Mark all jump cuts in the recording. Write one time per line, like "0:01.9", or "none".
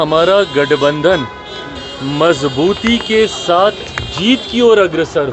none